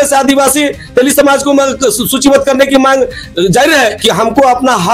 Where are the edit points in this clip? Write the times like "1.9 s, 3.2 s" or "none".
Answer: 4.0 s